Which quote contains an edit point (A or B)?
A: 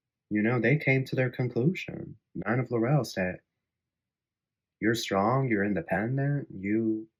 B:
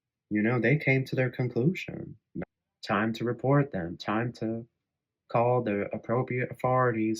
B